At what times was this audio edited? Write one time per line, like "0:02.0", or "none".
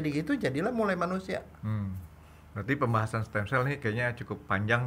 none

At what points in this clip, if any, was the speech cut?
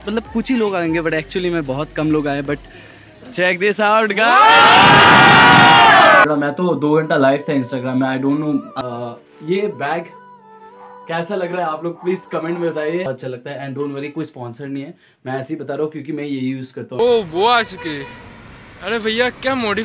0:06.2
0:08.7
0:13.1
0:17.0

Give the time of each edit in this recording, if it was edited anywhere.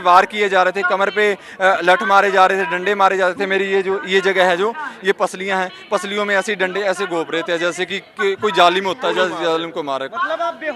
none

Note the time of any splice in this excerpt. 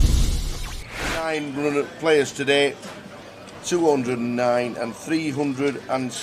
0:01.1

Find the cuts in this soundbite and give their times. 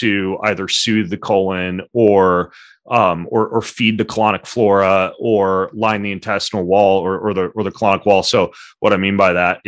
none

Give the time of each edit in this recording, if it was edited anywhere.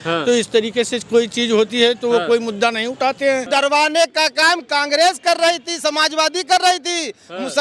0:03.5

